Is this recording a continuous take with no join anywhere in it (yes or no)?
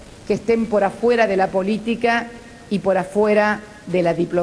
yes